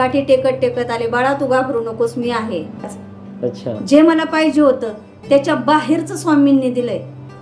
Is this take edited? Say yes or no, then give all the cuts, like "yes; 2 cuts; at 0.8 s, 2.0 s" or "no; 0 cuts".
yes; 1 cut; at 3.0 s